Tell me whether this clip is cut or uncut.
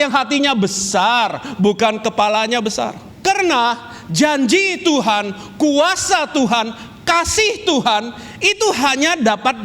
cut